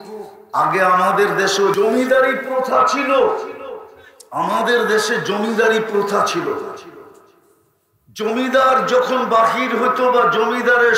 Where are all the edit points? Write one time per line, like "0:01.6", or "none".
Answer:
0:01.7